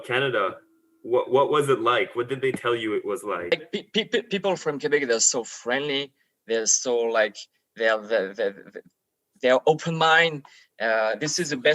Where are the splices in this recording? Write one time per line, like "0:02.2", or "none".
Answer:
0:03.5

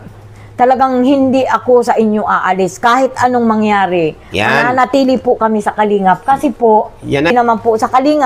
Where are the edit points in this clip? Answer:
0:07.3

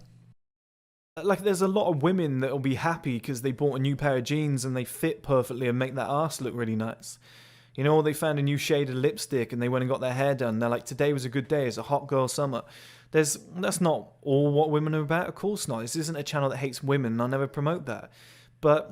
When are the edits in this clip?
0:01.1

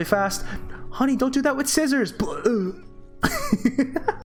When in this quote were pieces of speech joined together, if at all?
none

